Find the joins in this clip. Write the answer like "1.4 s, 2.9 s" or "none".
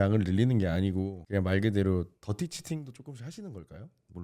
1.2 s